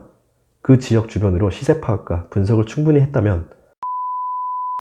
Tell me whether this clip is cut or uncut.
cut